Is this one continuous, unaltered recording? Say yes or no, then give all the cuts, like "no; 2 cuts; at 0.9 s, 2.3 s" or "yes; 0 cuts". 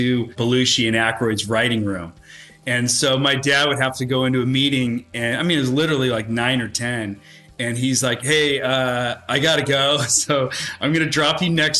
yes; 0 cuts